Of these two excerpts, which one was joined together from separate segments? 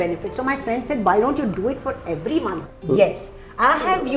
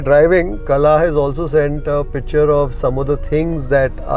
first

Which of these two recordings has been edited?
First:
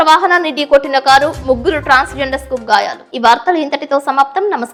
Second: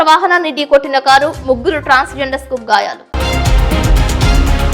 second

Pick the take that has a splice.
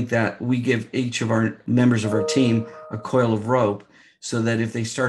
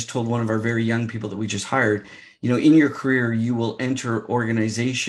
first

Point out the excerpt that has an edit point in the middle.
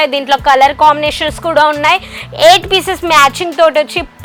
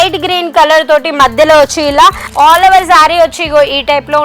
second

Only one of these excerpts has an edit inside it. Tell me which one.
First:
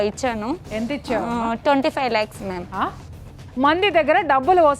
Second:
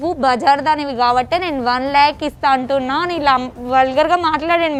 first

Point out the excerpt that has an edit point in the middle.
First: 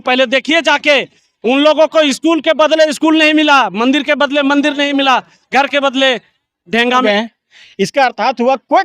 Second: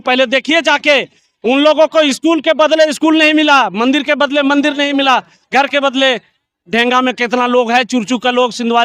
first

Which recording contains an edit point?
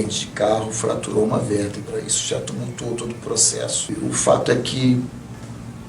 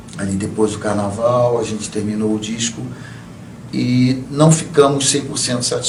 first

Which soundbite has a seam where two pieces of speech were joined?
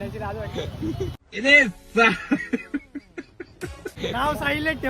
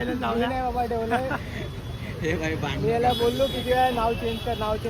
first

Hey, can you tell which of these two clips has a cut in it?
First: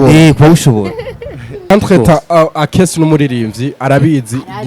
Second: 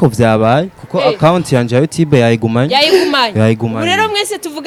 first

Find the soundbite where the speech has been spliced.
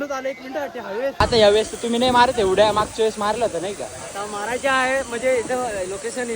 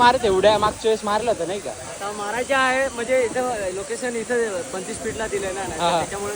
first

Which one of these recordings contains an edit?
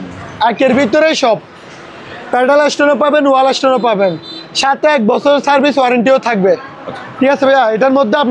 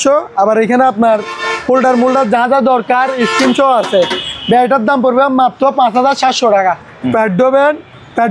second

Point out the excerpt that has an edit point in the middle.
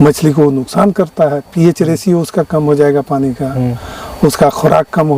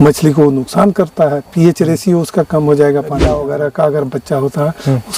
second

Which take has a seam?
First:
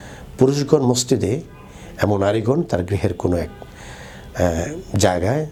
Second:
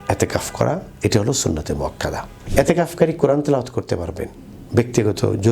second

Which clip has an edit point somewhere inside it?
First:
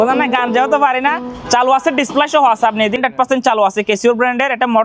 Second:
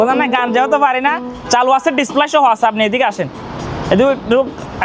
first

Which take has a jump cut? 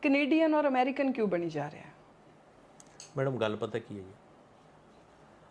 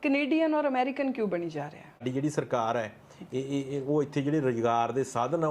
second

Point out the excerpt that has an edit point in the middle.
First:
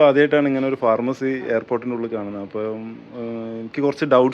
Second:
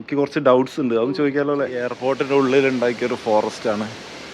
second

